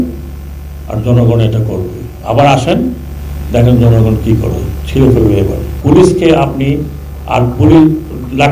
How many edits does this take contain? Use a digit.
1